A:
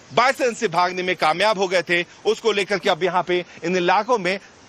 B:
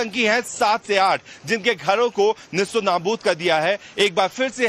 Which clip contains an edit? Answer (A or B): A